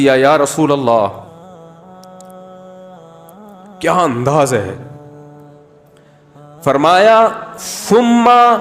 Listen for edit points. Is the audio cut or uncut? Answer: cut